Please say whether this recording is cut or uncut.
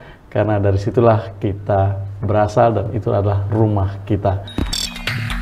cut